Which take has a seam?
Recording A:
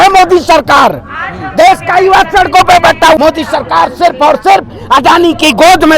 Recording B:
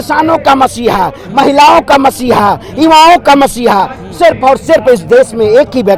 A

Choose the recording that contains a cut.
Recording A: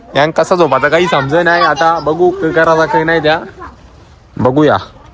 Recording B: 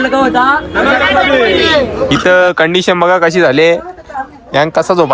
B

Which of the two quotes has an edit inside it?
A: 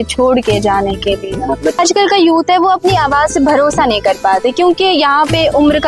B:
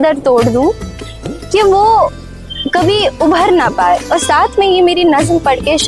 A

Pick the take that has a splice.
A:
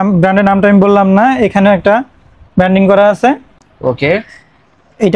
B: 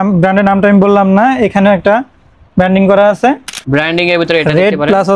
B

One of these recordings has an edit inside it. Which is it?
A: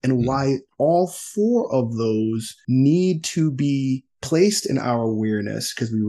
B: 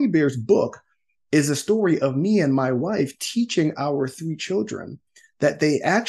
A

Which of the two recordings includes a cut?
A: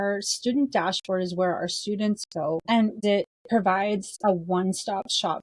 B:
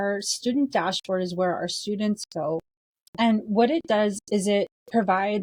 A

